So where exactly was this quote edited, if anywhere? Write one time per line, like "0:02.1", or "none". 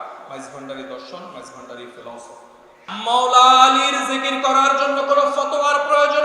0:02.9